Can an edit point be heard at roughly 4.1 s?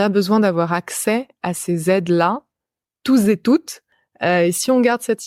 no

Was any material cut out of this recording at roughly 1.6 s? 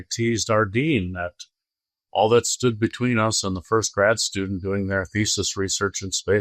no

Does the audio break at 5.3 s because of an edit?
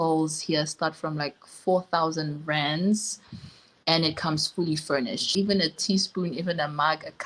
yes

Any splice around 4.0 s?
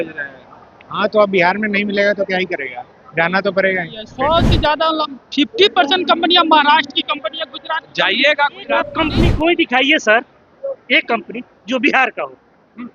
yes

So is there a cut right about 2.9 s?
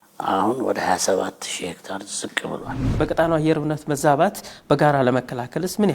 yes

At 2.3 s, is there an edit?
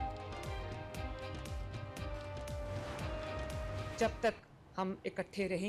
no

